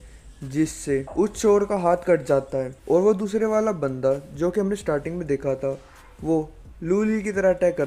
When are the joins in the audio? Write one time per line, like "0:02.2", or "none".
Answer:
none